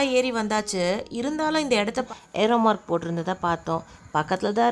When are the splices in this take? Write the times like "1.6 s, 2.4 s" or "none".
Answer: 2.1 s